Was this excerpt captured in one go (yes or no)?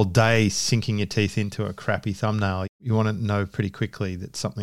yes